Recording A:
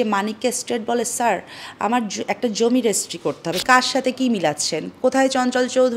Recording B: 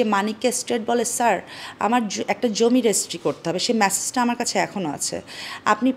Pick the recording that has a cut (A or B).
A